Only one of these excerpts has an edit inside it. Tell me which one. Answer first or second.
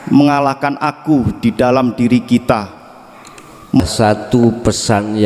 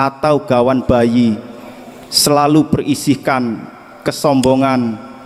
first